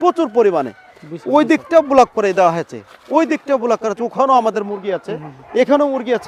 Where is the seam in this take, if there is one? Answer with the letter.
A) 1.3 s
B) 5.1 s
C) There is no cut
C